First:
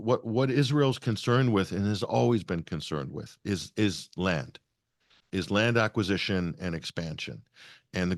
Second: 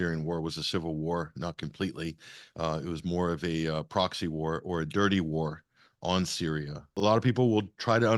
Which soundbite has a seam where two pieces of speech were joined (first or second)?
second